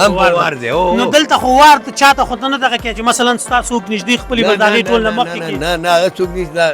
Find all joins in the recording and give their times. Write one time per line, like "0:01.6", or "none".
none